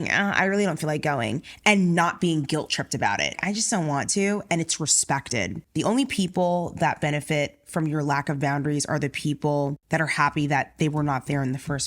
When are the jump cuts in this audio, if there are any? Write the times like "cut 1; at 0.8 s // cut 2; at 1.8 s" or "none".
cut 1; at 3.4 s // cut 2; at 5.6 s